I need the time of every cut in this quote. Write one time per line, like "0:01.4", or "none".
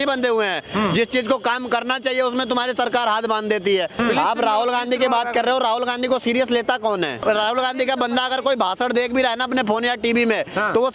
0:03.9
0:07.2